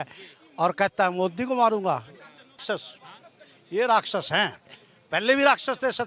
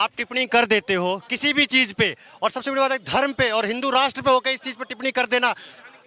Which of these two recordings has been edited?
first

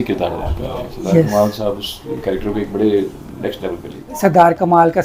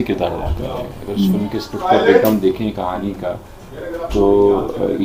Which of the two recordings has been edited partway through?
first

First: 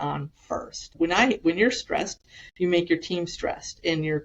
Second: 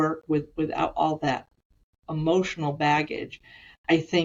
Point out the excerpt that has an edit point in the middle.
first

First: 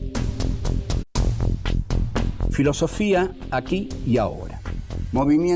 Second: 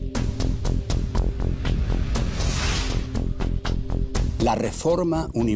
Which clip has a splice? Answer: second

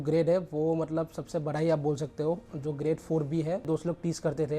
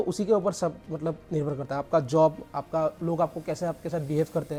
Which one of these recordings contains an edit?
first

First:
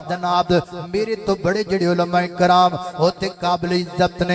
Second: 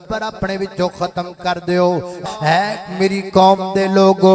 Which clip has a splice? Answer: second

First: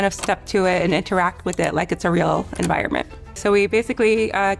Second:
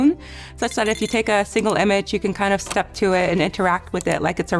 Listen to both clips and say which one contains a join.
first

